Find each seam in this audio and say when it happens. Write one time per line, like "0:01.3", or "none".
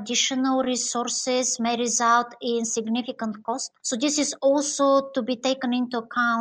0:03.7

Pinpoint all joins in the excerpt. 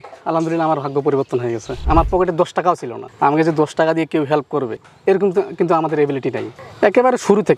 0:01.8
0:04.9

